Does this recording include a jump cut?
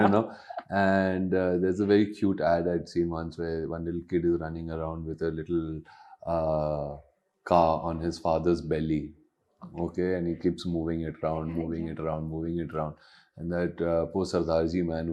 no; 0 cuts

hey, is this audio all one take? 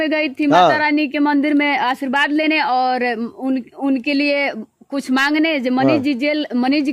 yes; 0 cuts

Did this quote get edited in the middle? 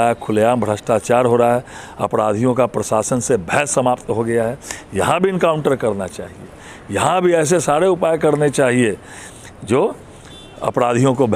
no; 0 cuts

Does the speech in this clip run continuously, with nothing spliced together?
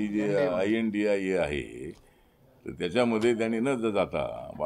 yes; 0 cuts

